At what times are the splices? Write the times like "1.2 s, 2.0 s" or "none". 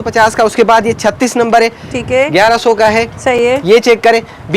none